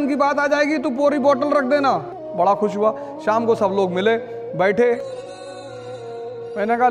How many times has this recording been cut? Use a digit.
0